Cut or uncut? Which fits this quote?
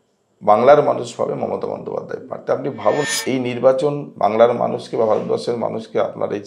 cut